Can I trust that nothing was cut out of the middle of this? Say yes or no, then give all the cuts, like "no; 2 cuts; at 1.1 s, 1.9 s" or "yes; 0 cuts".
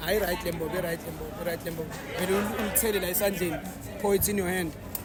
yes; 0 cuts